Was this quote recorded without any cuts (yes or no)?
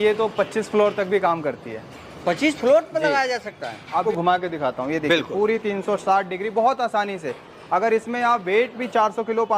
no